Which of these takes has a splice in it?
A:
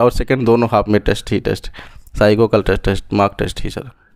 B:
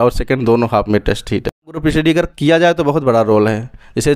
B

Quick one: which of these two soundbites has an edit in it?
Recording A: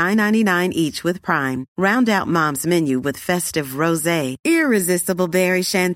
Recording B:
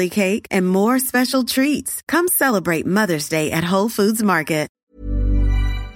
B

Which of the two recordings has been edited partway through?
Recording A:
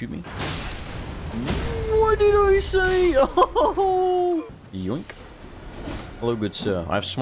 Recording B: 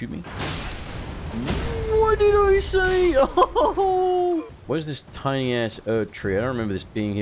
B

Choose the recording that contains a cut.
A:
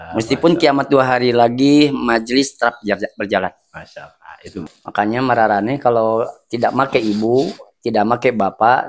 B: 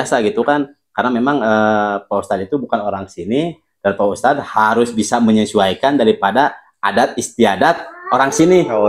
A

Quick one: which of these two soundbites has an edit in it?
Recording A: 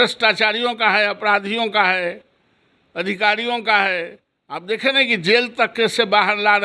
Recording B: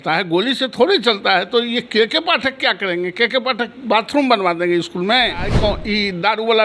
B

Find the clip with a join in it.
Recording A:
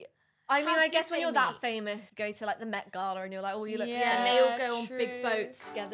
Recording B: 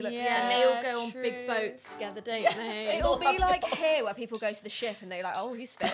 A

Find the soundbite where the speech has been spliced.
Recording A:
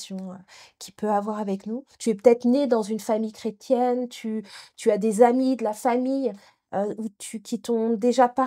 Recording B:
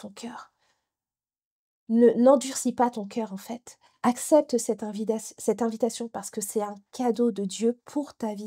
A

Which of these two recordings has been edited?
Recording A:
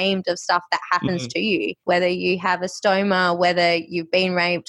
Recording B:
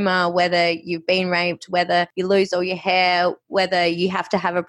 A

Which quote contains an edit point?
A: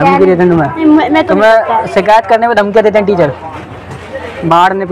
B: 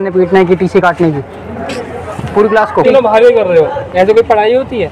B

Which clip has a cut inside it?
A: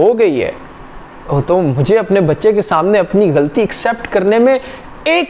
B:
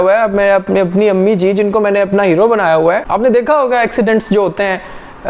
B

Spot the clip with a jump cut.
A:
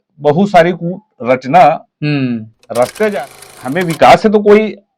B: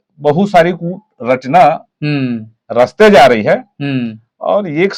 A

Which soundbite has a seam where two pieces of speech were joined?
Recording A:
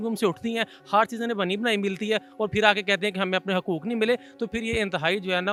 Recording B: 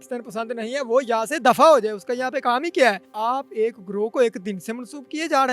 B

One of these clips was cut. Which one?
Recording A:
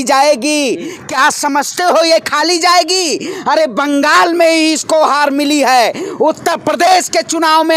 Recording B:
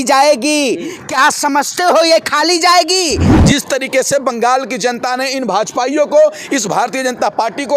B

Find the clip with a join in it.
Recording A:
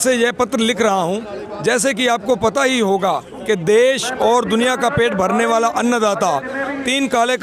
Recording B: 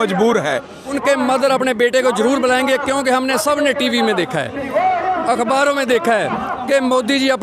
B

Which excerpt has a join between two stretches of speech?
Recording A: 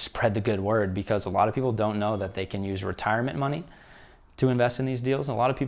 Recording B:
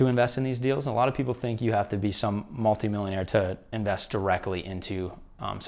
B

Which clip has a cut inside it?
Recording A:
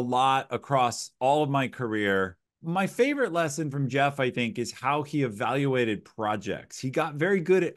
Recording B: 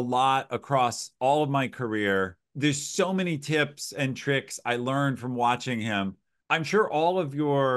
A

